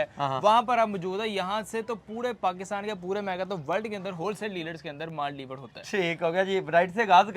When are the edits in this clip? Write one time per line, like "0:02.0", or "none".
none